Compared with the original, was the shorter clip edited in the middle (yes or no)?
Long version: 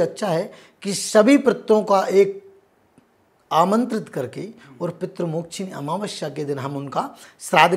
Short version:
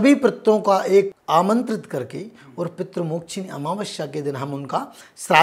yes